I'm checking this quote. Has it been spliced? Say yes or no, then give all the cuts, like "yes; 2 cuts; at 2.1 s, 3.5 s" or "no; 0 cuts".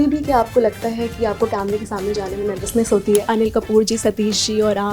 yes; 1 cut; at 3.3 s